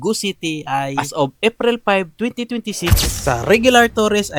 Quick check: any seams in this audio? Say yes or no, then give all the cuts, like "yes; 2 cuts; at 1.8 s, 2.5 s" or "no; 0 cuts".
no; 0 cuts